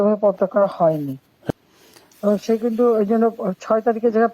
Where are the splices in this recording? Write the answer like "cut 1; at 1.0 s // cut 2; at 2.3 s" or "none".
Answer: cut 1; at 1.5 s